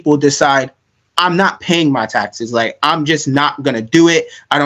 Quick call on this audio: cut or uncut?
uncut